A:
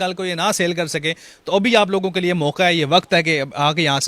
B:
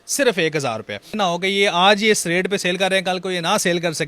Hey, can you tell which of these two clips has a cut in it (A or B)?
B